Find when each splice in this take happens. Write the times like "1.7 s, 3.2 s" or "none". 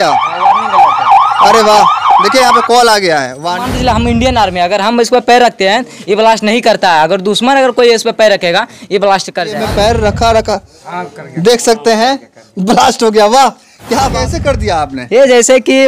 3.7 s, 9.5 s, 14.1 s